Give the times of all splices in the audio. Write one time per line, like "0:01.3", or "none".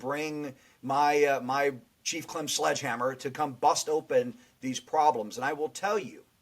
0:01.9